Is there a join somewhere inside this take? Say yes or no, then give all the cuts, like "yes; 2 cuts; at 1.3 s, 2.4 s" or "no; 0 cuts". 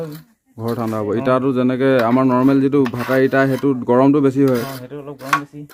no; 0 cuts